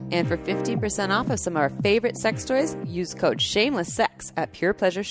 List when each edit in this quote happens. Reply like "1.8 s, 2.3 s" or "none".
none